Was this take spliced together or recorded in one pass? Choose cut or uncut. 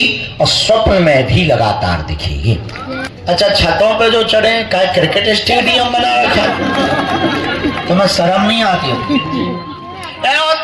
cut